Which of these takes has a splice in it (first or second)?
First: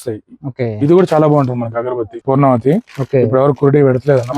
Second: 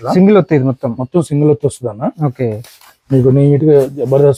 first